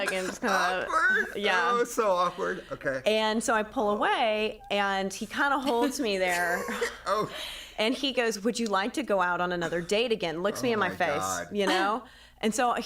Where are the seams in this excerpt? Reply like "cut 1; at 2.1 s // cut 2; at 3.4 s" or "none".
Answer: none